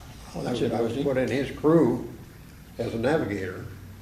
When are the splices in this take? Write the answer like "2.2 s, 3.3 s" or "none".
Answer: none